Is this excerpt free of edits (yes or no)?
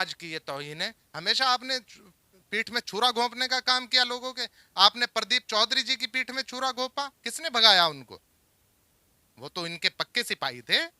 no